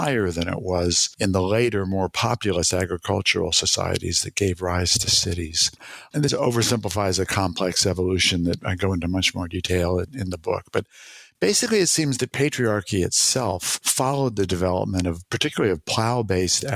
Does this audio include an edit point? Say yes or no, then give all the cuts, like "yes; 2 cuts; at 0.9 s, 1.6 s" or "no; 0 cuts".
no; 0 cuts